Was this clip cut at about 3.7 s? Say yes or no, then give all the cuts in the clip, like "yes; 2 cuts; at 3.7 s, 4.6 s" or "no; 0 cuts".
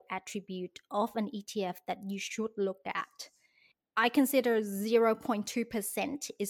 yes; 1 cut; at 3.7 s